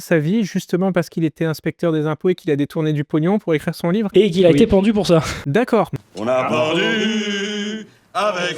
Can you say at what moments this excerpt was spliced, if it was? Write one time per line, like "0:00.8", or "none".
0:06.0